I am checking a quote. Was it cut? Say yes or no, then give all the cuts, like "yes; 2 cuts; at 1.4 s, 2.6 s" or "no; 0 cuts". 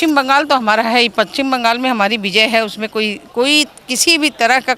no; 0 cuts